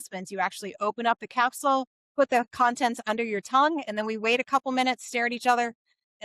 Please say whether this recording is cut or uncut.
cut